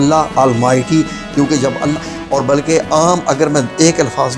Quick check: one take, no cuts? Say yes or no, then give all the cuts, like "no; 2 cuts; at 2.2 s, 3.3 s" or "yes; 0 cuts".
no; 1 cut; at 2.0 s